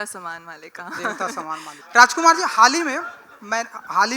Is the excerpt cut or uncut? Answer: cut